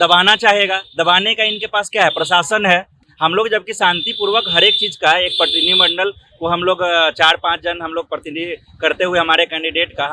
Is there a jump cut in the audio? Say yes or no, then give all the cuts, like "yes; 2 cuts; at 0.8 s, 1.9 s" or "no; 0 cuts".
no; 0 cuts